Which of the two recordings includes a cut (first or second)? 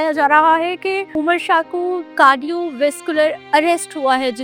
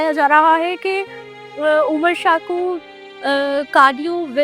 first